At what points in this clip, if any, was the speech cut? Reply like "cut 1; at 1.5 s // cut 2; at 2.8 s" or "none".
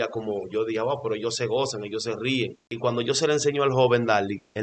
cut 1; at 2.6 s